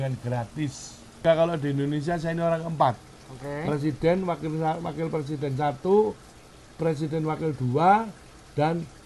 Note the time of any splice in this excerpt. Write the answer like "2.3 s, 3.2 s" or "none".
1.2 s